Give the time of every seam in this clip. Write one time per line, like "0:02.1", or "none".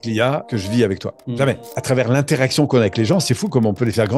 0:01.7